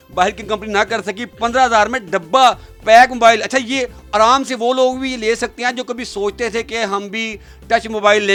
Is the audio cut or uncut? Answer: uncut